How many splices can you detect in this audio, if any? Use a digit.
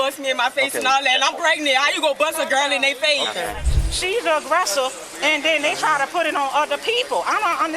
1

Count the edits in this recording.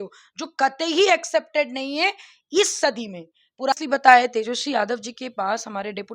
1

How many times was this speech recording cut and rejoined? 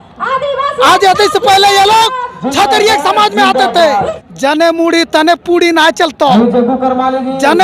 1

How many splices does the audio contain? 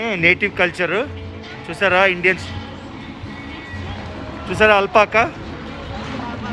0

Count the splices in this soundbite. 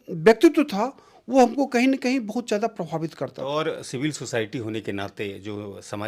1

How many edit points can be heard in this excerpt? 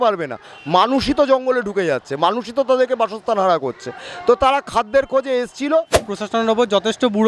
1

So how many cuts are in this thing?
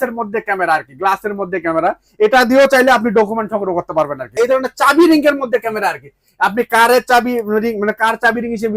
1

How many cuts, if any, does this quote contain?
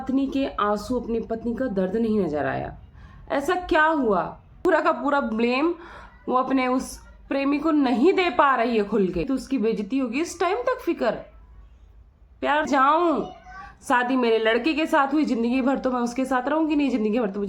3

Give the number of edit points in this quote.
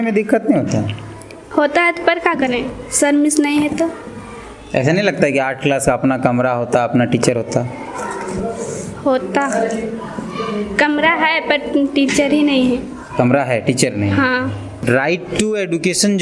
1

